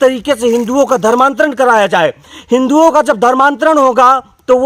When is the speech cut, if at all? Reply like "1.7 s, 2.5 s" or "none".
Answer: none